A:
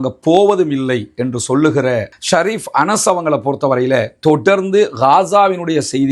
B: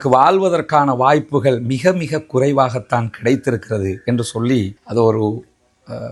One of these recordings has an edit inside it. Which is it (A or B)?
A